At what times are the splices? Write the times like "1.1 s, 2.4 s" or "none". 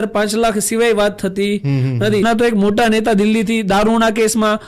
2.2 s